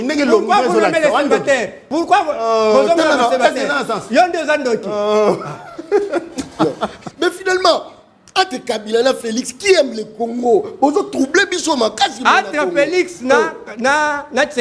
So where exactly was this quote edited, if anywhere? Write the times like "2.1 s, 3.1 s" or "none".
1.8 s, 7.0 s